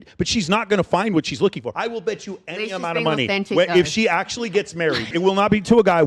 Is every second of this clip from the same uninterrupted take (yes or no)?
no